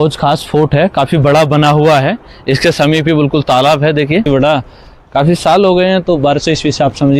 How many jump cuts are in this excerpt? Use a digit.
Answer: 1